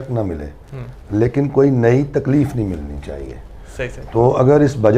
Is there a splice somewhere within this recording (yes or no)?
no